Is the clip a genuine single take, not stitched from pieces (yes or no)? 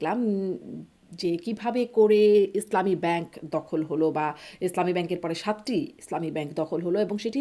yes